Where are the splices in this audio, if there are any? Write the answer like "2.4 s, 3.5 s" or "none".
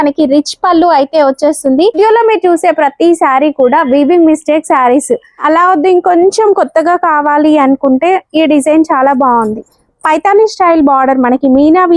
2.0 s, 5.4 s